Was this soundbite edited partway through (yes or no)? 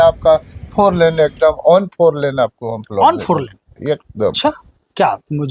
no